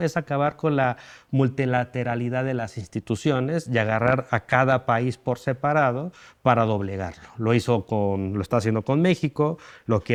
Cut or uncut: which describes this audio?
uncut